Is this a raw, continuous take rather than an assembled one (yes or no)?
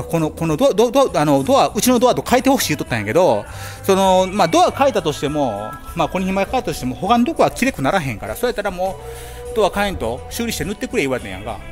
no